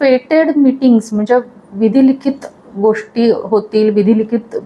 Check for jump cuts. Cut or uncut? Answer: uncut